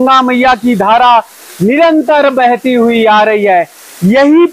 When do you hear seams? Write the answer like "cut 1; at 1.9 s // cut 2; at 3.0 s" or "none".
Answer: none